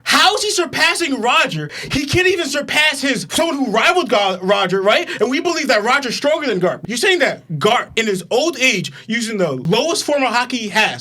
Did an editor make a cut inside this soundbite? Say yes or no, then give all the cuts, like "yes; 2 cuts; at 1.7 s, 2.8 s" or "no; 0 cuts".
no; 0 cuts